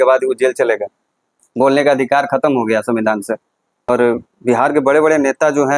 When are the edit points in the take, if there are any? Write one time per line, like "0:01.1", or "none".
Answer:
0:03.9